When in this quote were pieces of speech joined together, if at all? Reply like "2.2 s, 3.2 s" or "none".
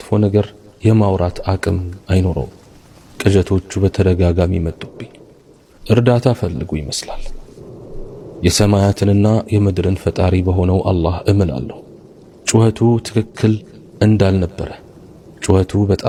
none